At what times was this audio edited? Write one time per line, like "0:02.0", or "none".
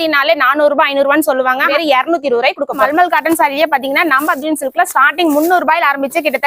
0:01.7
0:02.9